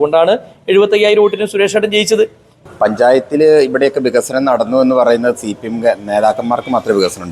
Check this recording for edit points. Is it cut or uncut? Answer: cut